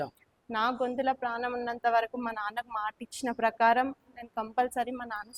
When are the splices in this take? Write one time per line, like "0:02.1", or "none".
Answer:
none